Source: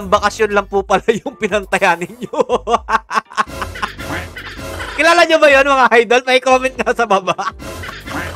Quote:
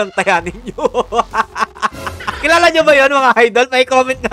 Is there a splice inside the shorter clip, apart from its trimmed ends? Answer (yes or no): yes